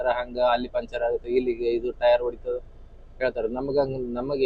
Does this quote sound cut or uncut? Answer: uncut